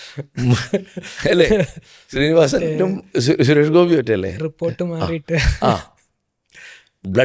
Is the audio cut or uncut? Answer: uncut